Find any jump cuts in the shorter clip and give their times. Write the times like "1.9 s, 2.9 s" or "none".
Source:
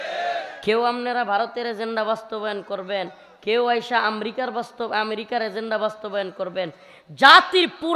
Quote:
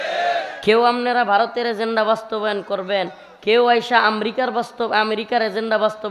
none

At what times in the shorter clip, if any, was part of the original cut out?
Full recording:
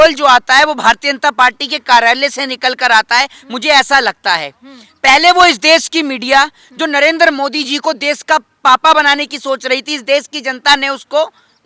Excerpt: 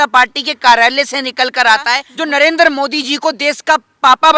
2.1 s

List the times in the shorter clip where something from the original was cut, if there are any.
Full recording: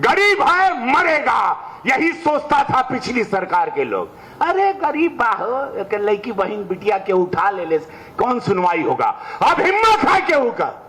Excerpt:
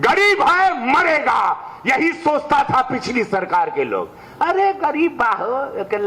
none

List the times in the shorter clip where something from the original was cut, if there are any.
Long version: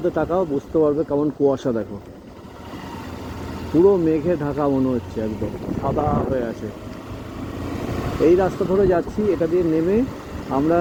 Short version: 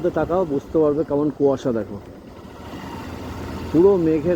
none

